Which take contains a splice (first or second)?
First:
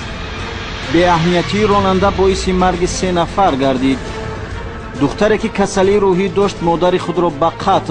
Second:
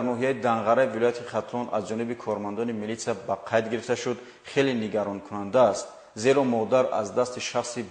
first